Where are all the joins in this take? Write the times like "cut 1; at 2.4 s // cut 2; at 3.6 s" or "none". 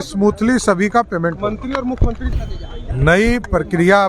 cut 1; at 2.4 s